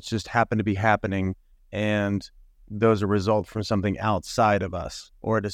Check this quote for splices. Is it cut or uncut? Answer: uncut